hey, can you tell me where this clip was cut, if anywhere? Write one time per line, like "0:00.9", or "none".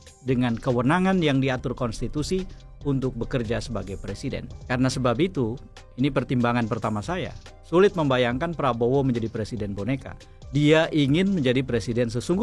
none